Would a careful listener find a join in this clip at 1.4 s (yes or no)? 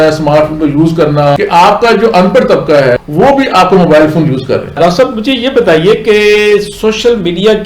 yes